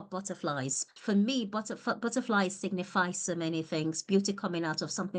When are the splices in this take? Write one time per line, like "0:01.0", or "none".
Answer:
0:00.9